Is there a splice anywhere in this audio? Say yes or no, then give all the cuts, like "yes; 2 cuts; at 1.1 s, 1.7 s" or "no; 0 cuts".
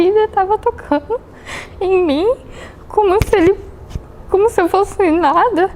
no; 0 cuts